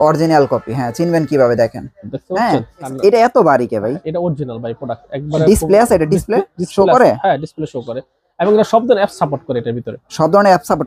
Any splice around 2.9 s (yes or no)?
yes